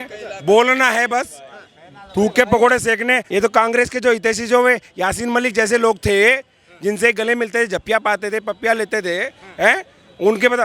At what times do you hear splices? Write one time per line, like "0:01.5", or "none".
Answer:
0:03.2